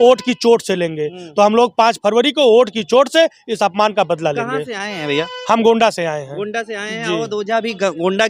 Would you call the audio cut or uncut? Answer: uncut